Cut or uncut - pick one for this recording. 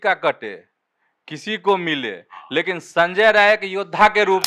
uncut